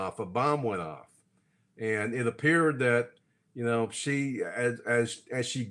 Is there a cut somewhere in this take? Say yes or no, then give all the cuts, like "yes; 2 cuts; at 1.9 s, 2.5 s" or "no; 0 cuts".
no; 0 cuts